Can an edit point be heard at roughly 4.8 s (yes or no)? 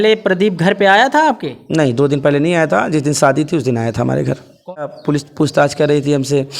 yes